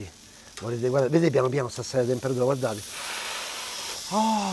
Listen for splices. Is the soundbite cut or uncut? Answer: uncut